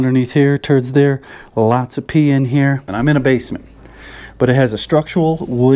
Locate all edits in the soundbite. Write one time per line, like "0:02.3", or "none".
0:02.9